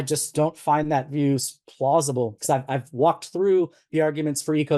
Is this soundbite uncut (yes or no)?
no